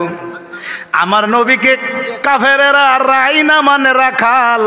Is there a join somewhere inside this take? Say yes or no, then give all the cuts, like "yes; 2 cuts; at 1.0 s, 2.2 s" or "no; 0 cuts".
no; 0 cuts